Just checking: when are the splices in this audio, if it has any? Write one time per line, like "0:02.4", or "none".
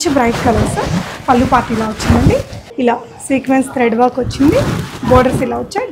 0:02.6